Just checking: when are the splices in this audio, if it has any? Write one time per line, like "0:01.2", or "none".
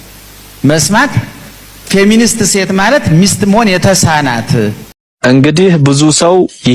0:04.9